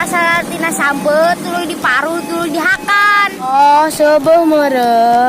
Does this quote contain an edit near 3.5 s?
yes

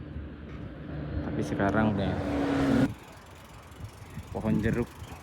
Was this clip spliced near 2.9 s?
yes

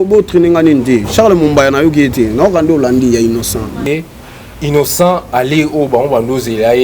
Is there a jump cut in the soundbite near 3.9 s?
yes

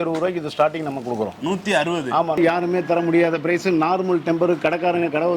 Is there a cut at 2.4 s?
yes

